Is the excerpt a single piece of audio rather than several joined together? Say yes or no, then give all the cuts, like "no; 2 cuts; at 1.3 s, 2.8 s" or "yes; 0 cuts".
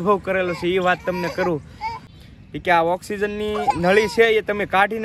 no; 1 cut; at 2.1 s